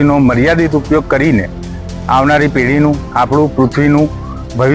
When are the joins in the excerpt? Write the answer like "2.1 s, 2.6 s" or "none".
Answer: none

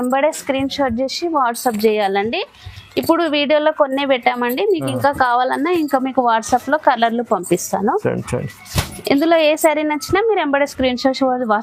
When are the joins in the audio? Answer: none

